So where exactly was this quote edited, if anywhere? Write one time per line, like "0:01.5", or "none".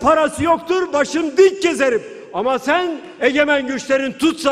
none